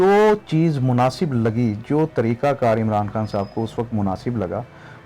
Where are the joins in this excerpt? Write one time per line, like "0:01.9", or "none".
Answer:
none